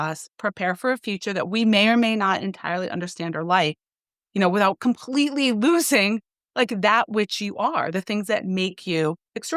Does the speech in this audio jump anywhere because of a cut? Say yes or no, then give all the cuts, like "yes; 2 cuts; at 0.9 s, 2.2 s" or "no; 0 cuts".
no; 0 cuts